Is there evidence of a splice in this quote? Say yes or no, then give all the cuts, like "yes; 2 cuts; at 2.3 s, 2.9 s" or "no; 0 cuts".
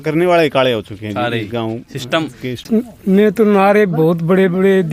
yes; 1 cut; at 2.6 s